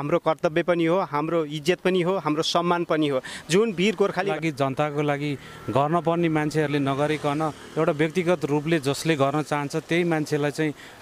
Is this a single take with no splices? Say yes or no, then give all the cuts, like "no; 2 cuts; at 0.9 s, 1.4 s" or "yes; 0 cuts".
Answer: no; 1 cut; at 4.3 s